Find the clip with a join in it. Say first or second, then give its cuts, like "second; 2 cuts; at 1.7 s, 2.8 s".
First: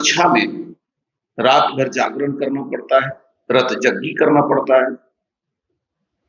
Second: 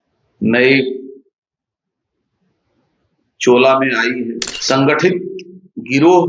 second; 1 cut; at 4.5 s